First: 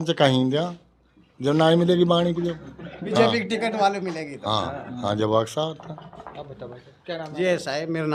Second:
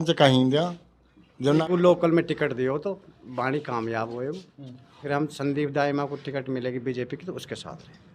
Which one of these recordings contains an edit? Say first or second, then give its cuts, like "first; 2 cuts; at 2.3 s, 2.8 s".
second; 2 cuts; at 1.6 s, 5.0 s